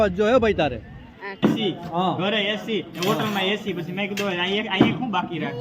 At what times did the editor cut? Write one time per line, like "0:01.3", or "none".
0:01.4